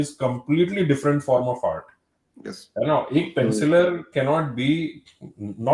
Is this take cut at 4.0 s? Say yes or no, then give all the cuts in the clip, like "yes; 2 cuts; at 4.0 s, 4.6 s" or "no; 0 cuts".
no; 0 cuts